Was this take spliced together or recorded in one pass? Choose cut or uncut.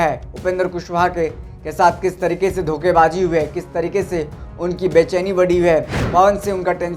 cut